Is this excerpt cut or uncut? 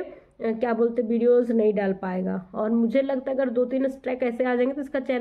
uncut